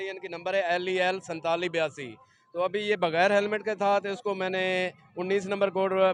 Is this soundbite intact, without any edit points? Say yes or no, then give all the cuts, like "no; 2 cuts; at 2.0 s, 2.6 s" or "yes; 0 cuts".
yes; 0 cuts